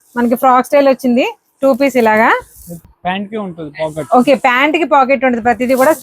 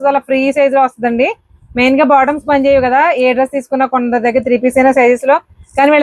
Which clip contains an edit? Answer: first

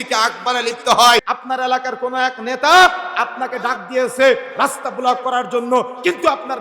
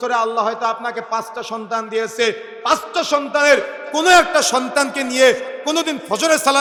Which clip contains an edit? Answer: first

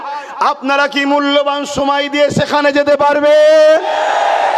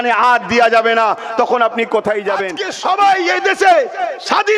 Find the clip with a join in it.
second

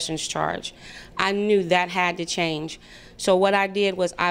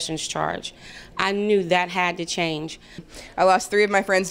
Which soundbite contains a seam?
second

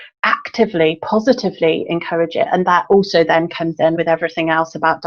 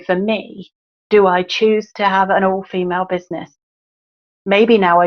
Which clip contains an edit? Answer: first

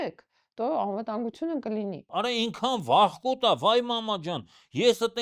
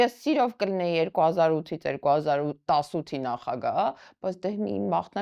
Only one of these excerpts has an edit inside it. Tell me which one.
first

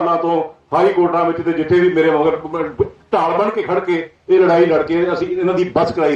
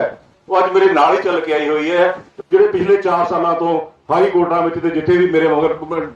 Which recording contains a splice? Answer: second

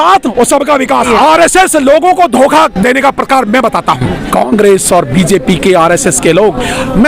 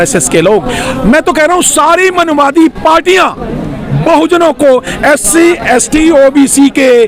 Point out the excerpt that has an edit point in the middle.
first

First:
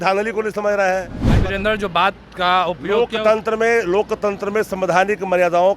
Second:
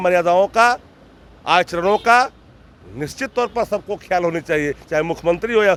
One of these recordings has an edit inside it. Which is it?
first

